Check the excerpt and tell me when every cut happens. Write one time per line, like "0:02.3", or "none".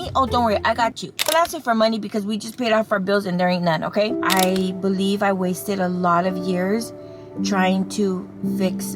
0:01.1
0:04.2